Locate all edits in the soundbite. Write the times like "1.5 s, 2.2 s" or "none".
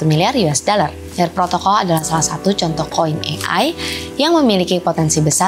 1.0 s